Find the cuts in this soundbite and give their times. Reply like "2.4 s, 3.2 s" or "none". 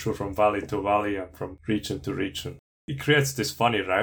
1.6 s, 2.9 s